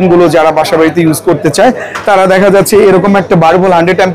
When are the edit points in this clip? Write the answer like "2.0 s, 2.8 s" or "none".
none